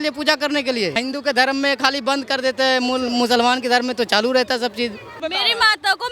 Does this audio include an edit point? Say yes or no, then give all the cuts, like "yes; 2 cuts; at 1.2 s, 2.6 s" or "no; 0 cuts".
yes; 2 cuts; at 1.0 s, 5.2 s